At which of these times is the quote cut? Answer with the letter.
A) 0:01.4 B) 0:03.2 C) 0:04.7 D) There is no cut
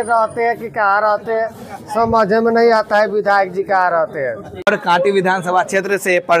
C